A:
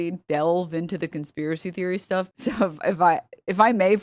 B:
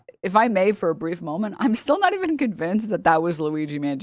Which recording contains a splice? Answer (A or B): A